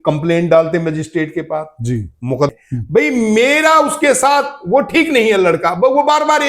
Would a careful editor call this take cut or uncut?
cut